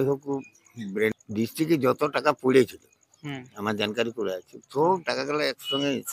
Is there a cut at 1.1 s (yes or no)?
yes